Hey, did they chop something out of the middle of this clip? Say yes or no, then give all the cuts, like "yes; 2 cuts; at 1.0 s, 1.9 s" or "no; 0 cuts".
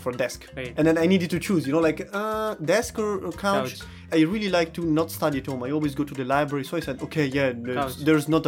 yes; 1 cut; at 4.0 s